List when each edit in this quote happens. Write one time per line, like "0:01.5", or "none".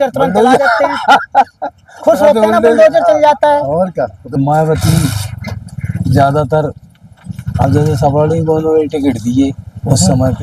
0:04.4

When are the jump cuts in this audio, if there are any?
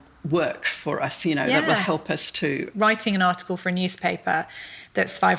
0:02.7

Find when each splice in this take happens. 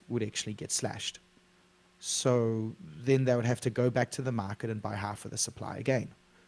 none

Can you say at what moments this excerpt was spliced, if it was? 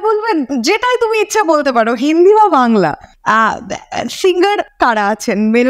0:03.1
0:04.7

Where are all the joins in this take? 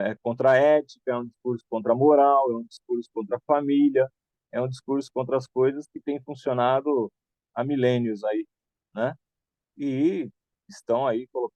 none

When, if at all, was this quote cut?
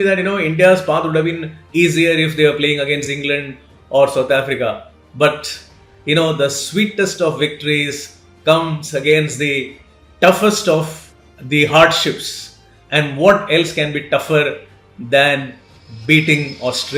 none

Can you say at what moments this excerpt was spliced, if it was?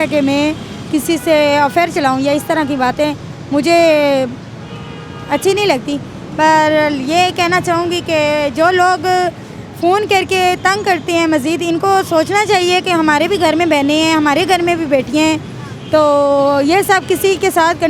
none

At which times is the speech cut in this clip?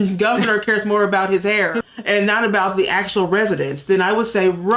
0:01.8

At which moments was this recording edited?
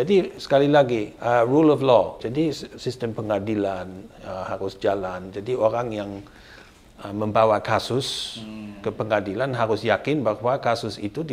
0:01.1
0:02.2

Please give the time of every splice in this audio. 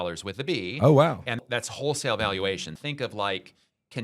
0:01.4
0:02.8

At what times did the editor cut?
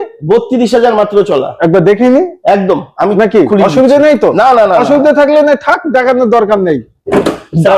none

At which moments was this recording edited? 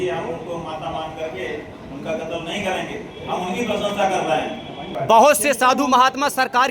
0:04.9

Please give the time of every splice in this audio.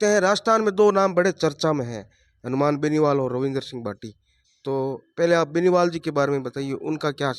none

